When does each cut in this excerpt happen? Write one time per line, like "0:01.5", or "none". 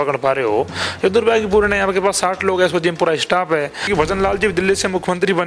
0:03.8